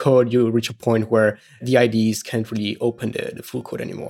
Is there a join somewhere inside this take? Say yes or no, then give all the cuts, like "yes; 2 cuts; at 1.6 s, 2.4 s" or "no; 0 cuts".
yes; 1 cut; at 1.5 s